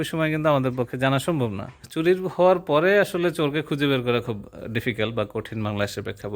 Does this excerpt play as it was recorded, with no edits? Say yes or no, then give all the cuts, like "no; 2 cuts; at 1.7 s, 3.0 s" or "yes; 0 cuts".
no; 1 cut; at 1.9 s